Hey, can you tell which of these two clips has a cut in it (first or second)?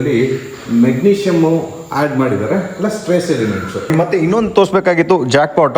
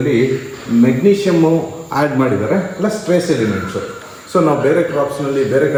first